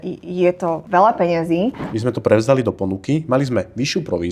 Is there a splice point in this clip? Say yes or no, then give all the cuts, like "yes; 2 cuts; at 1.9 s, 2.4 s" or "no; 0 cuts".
yes; 2 cuts; at 0.8 s, 1.9 s